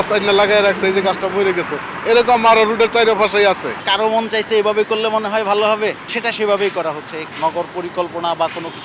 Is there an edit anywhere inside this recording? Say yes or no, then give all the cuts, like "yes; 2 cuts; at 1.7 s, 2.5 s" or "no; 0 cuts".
yes; 3 cuts; at 3.8 s, 6.1 s, 7.2 s